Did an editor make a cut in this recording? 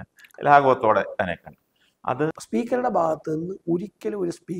yes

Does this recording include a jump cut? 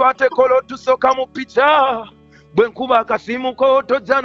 no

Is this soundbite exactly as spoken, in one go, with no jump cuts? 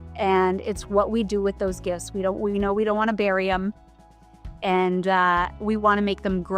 yes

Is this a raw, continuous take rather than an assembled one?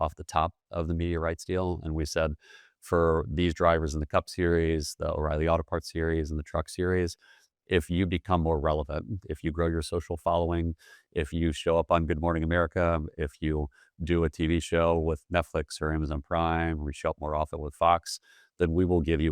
yes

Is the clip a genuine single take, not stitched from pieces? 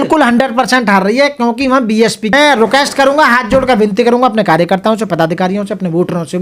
no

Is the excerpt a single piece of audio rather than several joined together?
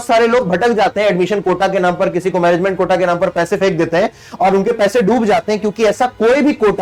yes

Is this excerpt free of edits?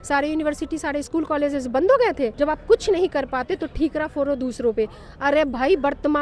no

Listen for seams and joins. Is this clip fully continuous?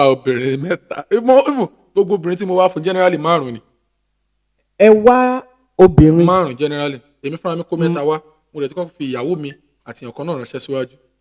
yes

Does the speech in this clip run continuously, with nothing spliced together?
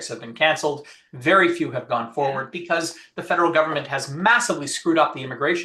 no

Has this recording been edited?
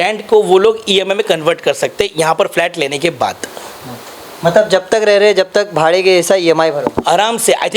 no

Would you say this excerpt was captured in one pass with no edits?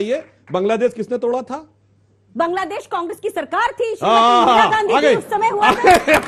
yes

